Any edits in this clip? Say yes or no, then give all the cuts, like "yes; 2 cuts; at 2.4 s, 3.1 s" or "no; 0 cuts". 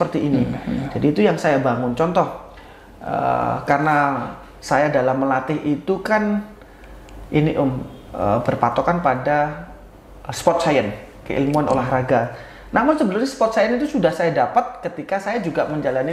no; 0 cuts